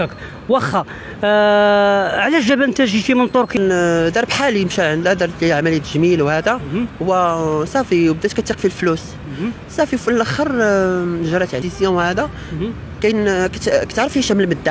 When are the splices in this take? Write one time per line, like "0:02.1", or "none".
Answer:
0:03.6
0:11.6